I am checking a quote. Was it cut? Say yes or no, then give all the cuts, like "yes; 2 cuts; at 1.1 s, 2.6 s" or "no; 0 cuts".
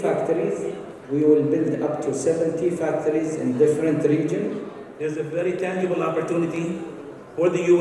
yes; 1 cut; at 4.8 s